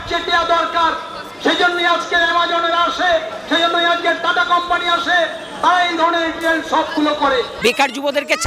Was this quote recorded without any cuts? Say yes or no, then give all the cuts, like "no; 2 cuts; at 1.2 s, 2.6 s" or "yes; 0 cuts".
no; 1 cut; at 7.5 s